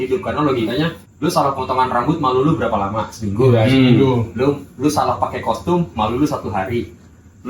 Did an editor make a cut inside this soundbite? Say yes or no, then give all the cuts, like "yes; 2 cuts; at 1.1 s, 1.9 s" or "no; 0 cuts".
yes; 1 cut; at 1.0 s